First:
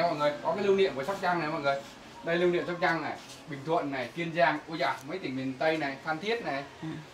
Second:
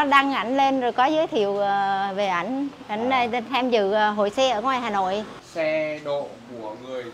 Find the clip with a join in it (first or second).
second